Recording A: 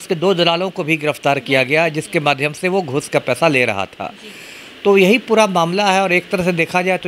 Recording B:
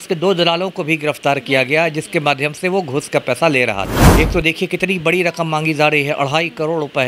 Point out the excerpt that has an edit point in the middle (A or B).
B